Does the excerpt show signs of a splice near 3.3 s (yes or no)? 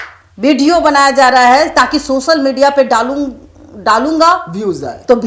no